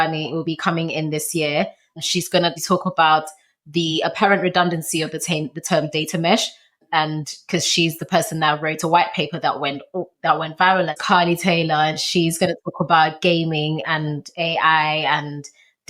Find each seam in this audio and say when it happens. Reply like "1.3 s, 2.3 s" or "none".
2.2 s, 6.7 s, 11.0 s